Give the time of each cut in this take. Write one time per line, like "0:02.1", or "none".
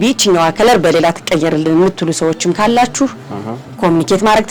none